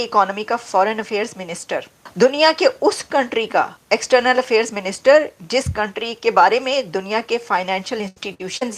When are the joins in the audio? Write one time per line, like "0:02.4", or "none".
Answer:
0:02.0
0:03.8